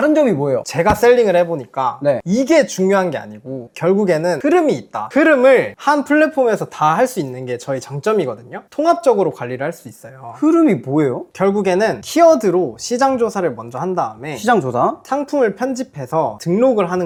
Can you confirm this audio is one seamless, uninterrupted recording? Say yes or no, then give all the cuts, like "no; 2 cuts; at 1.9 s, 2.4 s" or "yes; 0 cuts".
yes; 0 cuts